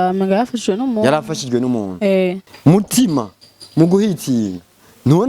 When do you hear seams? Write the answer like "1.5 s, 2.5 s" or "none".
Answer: 2.4 s

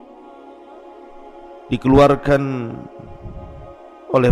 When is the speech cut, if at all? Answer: 1.7 s

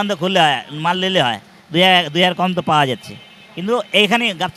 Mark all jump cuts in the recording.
none

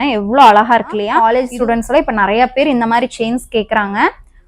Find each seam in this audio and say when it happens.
1.1 s

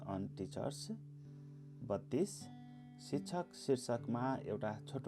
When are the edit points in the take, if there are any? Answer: none

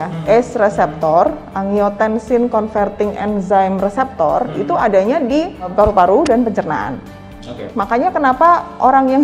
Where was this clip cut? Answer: 5.7 s, 7.6 s

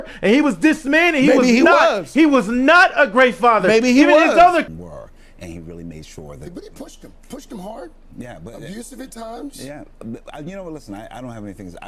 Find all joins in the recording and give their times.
4.8 s

